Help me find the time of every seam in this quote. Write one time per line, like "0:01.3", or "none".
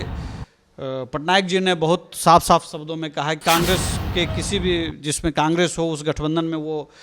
0:03.4